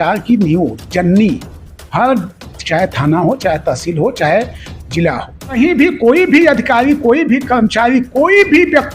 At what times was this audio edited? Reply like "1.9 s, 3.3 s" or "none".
5.6 s